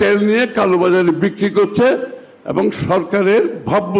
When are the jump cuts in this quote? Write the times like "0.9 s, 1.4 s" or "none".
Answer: none